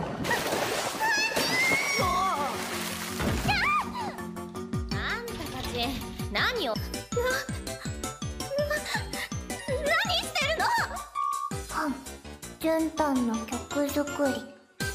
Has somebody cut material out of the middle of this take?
no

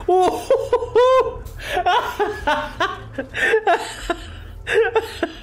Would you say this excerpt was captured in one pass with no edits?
yes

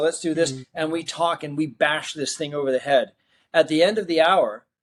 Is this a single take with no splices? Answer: yes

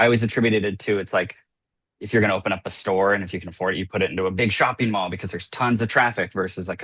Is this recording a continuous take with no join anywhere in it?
yes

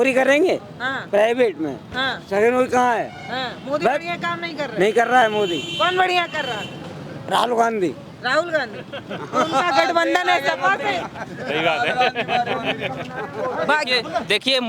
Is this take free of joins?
yes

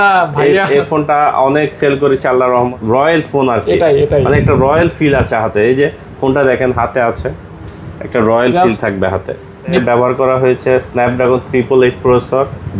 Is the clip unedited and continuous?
no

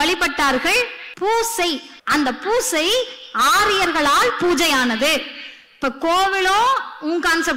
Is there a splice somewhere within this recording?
yes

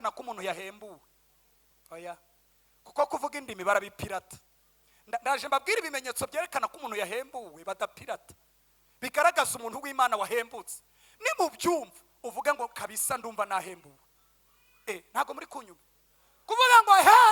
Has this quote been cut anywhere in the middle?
no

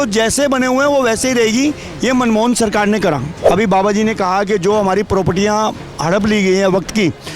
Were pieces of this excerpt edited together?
yes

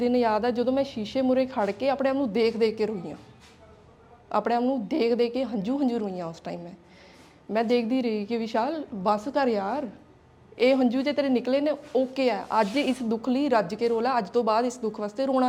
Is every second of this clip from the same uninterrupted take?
yes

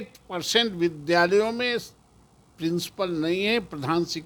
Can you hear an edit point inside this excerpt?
no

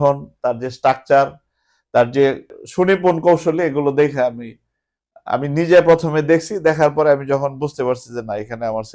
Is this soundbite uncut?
no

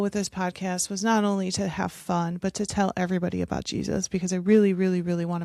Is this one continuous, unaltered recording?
yes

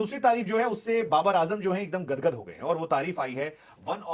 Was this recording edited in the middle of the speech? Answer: no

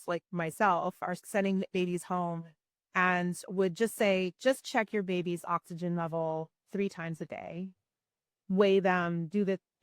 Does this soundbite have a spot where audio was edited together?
yes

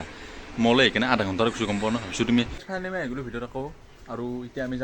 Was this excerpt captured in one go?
no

